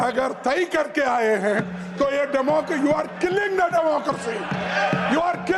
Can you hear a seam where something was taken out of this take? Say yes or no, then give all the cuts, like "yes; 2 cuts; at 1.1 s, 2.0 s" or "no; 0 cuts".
no; 0 cuts